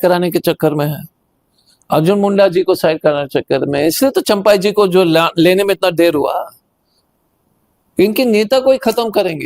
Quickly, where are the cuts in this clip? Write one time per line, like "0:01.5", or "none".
none